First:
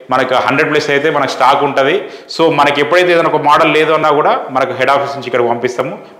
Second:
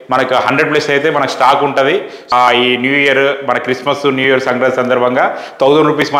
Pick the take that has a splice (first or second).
second